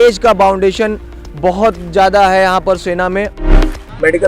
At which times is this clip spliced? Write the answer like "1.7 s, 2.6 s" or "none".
3.3 s